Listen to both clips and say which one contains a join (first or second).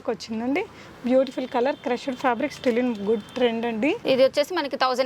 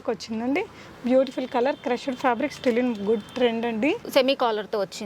second